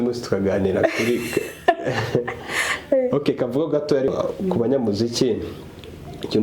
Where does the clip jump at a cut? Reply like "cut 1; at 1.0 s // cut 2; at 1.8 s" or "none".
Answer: cut 1; at 4.1 s